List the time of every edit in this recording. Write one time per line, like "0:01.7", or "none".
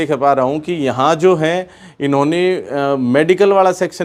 none